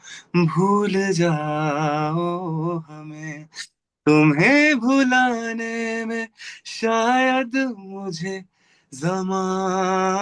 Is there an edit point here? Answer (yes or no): no